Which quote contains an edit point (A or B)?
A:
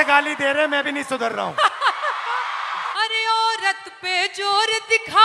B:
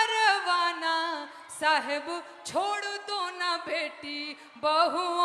A